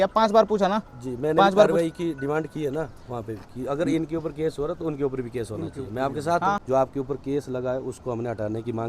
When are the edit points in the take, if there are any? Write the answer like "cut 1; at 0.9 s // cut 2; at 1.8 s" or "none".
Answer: cut 1; at 6.6 s